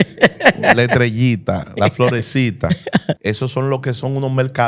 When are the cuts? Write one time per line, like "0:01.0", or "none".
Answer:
0:03.2